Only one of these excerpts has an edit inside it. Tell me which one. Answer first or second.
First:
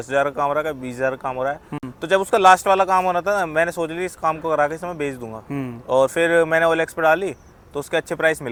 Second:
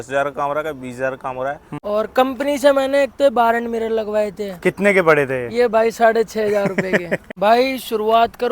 second